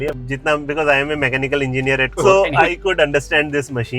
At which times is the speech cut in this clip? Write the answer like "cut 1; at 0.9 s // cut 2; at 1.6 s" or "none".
cut 1; at 2.1 s